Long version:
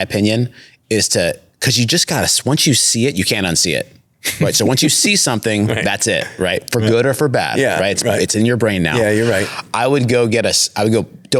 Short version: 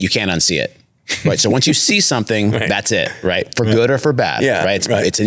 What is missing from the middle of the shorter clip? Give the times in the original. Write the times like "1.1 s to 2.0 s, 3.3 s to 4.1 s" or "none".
none